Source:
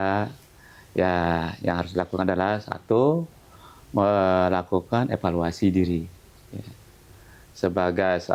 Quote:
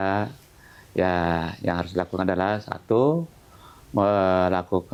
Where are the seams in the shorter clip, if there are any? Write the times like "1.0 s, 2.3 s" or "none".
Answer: none